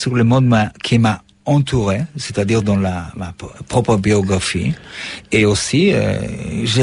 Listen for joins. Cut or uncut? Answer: uncut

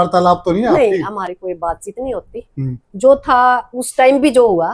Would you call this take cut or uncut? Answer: uncut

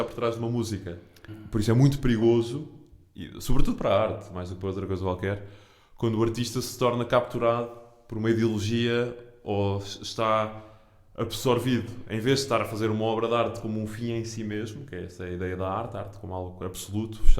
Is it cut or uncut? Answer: cut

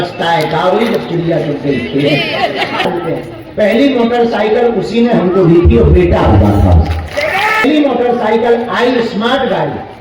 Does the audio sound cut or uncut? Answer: cut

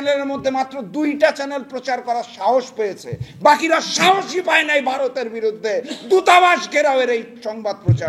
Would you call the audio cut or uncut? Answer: uncut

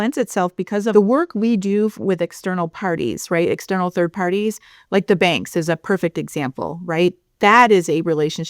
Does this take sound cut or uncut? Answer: cut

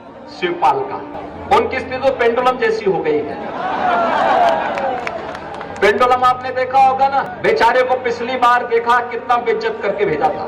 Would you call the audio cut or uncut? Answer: cut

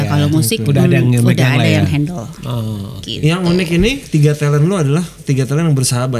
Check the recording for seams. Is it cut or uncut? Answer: uncut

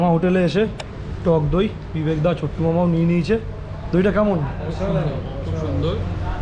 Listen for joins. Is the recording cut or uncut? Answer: uncut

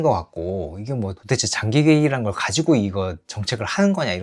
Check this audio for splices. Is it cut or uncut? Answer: uncut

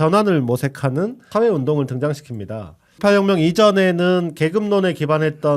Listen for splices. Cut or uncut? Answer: cut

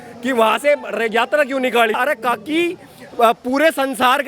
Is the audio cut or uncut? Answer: cut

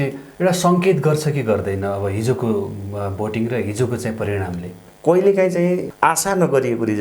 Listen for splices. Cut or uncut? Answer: cut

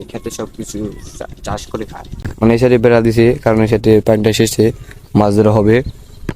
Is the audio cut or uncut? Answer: cut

